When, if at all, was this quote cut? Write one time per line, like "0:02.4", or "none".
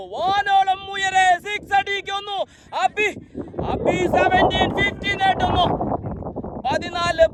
none